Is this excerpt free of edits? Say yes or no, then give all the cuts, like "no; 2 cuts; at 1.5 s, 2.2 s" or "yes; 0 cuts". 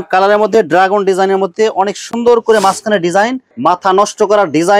no; 1 cut; at 3.4 s